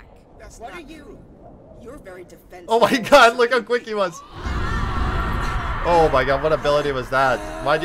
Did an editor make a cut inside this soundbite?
no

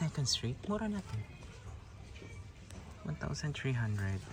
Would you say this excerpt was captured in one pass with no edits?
yes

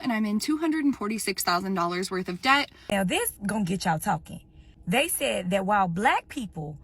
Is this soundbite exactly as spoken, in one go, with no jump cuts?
no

